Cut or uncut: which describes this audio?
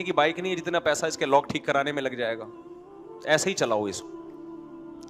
cut